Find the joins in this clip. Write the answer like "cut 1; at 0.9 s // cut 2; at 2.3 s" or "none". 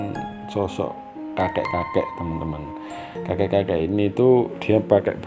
none